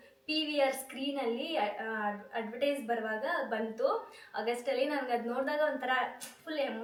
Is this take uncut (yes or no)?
yes